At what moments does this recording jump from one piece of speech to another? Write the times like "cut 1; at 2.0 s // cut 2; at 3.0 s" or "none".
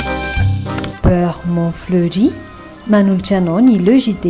none